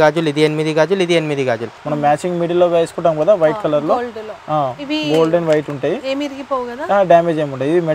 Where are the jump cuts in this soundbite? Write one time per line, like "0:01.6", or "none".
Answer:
0:01.8